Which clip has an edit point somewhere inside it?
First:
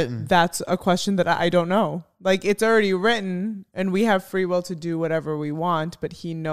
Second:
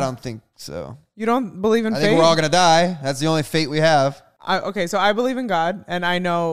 second; 1 cut; at 4.3 s

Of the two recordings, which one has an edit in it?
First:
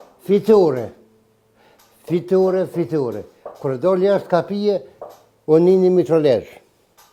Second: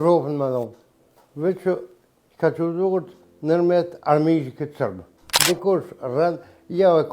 second; 1 cut; at 5.3 s

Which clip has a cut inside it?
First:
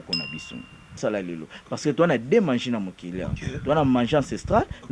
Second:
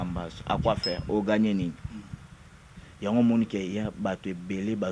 first; 1 cut; at 1.0 s

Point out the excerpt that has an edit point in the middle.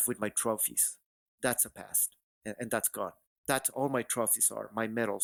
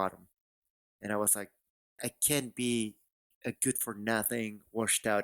second; 1 cut; at 2.0 s

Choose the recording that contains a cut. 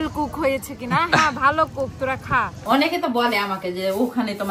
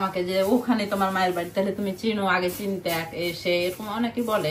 first; 1 cut; at 2.6 s

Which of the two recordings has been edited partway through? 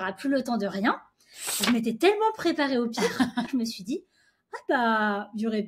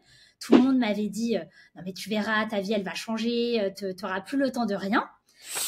first; 1 cut; at 3.5 s

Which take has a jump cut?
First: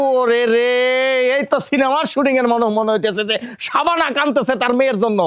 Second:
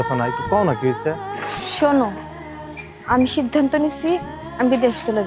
second; 1 cut; at 1.2 s

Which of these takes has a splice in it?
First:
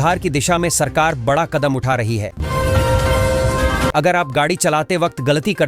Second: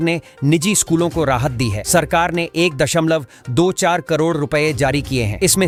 first; 2 cuts; at 2.3 s, 3.9 s

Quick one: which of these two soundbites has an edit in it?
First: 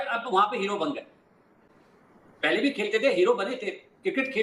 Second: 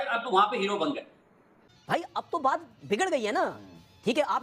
second; 1 cut; at 1.7 s

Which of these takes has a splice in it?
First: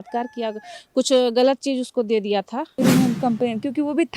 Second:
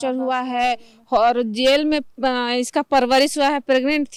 first; 1 cut; at 2.7 s

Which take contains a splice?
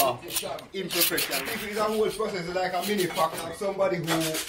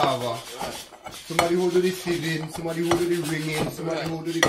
first; 2 cuts; at 1.3 s, 3.5 s

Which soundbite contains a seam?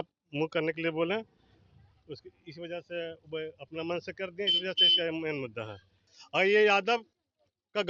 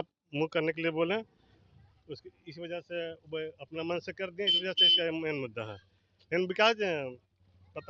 first; 1 cut; at 6.1 s

